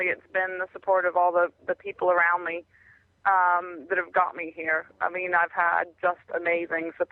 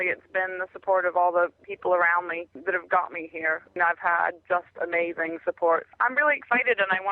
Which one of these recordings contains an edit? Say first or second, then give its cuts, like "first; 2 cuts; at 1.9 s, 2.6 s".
second; 4 cuts; at 1.6 s, 2.5 s, 3.7 s, 5.9 s